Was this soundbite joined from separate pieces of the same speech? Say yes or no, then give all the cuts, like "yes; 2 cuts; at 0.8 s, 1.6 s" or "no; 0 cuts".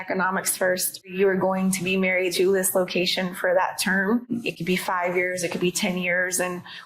yes; 3 cuts; at 1.1 s, 2.3 s, 4.3 s